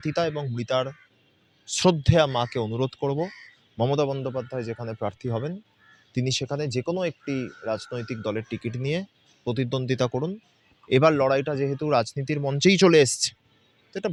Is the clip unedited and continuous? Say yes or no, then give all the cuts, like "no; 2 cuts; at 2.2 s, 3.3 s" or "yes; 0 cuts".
yes; 0 cuts